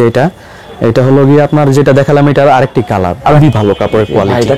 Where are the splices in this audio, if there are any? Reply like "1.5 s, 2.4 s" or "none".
3.4 s